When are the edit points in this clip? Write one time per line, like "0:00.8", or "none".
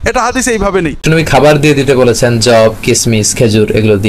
0:01.0

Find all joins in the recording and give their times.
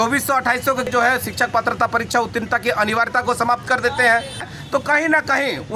0:00.9
0:04.5

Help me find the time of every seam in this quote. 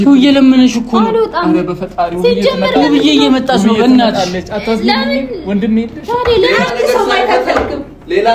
0:06.5

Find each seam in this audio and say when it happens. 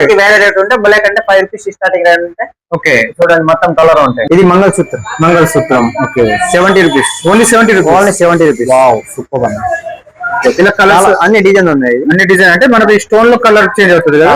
0:04.2

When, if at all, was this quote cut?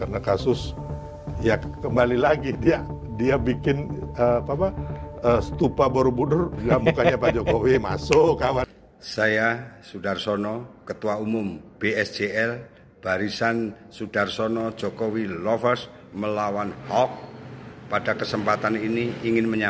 0:08.8

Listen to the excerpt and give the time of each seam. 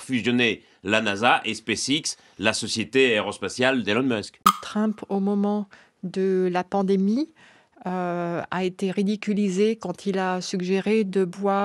0:04.5

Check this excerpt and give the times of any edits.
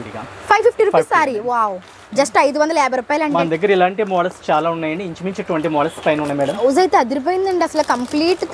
0:03.4
0:06.6

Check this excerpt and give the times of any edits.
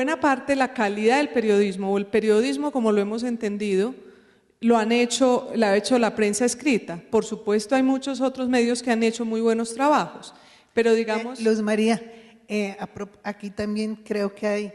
none

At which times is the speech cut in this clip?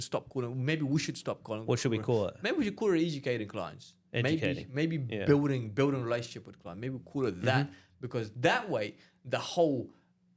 none

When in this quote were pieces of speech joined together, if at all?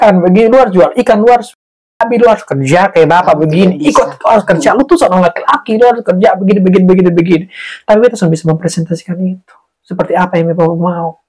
none

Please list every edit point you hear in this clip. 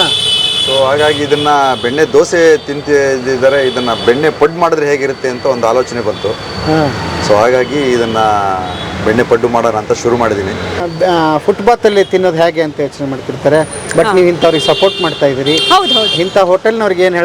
0:10.9

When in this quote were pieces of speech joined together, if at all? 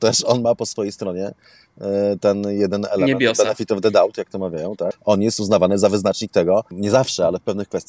0:05.0
0:06.7

